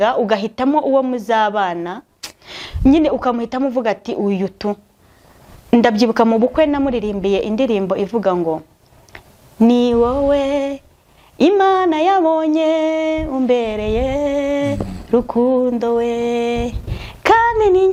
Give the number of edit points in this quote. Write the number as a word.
zero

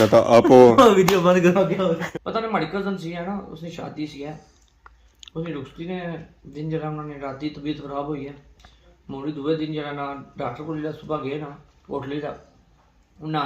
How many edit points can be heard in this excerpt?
one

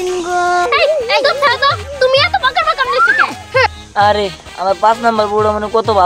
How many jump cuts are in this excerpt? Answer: one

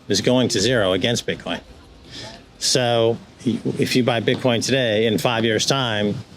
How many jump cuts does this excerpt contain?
one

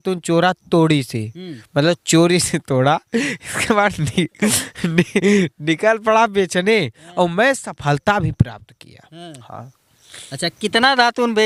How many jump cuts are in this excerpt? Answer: zero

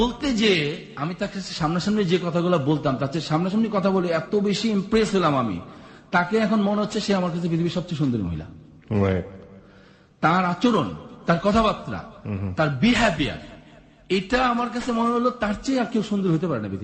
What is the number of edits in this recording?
zero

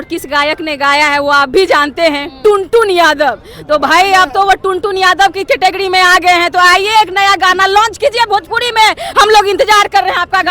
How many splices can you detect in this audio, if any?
zero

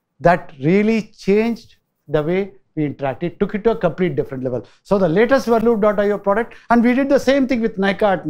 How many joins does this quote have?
zero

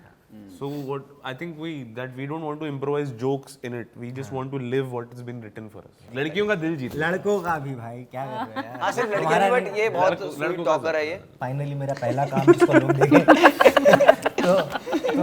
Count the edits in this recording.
two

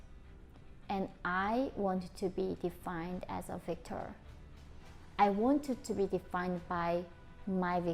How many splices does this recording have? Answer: zero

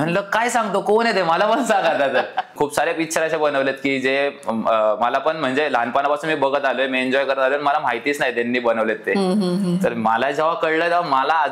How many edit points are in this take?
one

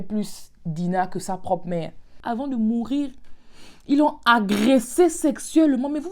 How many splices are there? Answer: one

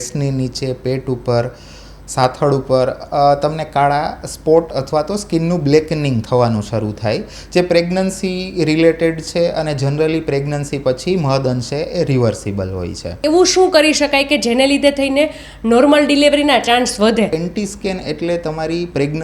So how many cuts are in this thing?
two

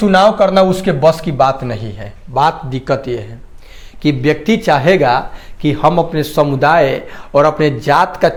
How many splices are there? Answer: zero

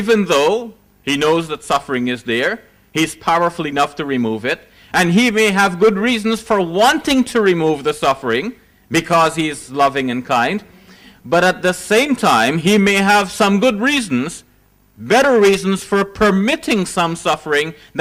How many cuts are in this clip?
zero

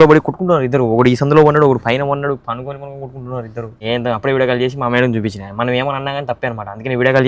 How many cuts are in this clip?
one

